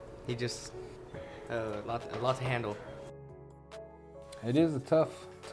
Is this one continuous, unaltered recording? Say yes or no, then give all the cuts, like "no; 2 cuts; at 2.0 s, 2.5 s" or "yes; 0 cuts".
no; 3 cuts; at 0.9 s, 2.9 s, 4.4 s